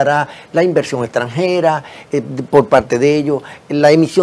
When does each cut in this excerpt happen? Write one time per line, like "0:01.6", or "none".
none